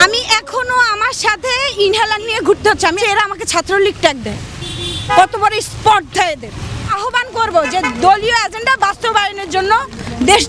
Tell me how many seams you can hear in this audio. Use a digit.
2